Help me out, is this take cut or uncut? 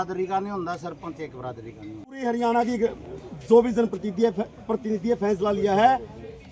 cut